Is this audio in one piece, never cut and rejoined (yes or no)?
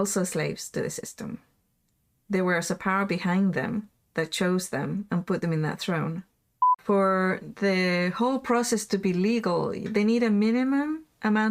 no